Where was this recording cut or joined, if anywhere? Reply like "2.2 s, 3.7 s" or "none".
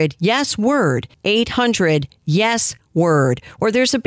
1.1 s